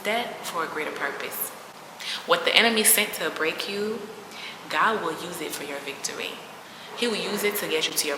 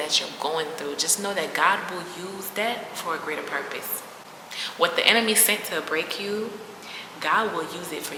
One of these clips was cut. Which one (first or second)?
first